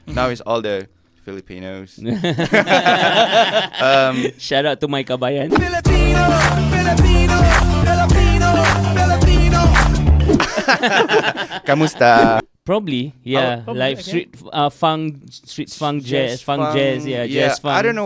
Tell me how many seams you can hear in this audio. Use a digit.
1